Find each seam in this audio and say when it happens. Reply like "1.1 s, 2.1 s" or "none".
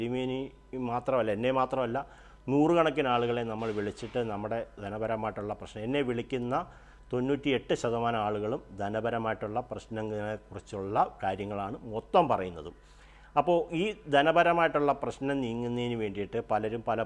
none